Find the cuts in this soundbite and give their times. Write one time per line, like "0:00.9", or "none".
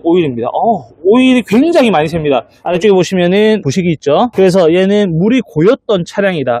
0:02.6
0:04.2